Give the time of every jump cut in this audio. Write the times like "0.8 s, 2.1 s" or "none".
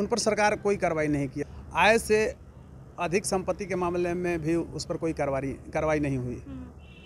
1.4 s